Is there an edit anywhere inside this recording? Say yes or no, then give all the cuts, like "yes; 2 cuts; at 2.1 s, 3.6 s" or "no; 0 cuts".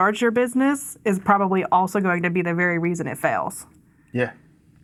no; 0 cuts